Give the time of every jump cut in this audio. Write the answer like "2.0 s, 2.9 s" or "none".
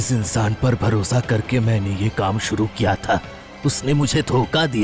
none